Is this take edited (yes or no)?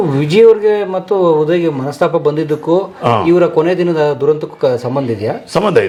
no